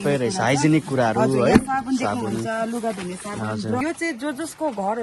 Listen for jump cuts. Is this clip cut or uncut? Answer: cut